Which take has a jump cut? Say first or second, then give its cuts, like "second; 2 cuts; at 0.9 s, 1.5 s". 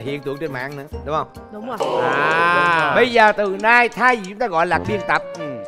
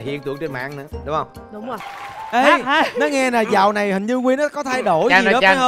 second; 1 cut; at 1.7 s